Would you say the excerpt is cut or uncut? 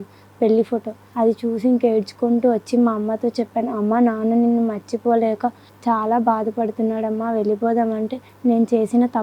cut